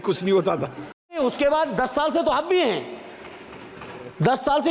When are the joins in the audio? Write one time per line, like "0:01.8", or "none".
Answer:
0:01.2